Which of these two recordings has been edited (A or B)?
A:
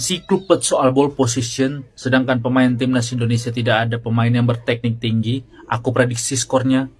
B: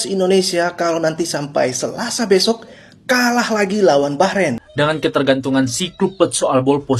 B